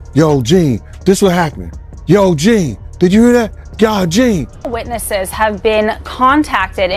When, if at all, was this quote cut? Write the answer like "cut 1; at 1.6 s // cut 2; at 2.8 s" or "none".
cut 1; at 4.7 s